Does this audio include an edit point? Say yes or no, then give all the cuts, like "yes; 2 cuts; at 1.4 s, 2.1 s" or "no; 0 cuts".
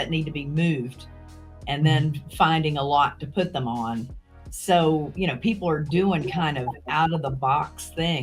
no; 0 cuts